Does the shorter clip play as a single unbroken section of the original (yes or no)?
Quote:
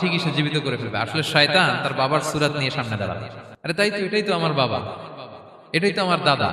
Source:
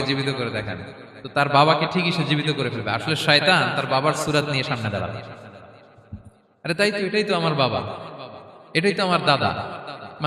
no